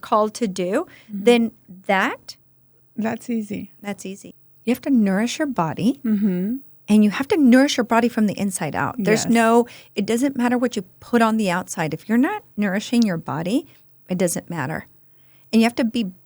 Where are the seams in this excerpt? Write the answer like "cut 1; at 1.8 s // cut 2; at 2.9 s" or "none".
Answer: cut 1; at 4.2 s